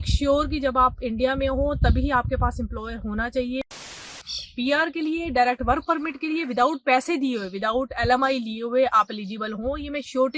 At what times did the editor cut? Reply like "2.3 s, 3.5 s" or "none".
3.9 s